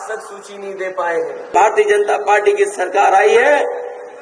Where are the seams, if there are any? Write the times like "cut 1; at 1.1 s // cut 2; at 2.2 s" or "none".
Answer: cut 1; at 1.5 s